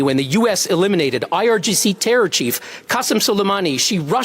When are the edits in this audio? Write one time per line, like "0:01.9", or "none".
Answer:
none